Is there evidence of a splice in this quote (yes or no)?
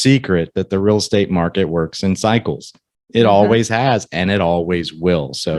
no